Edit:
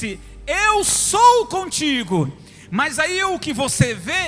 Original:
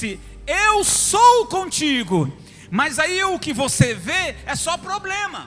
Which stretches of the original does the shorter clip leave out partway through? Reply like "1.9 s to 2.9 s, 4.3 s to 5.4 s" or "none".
none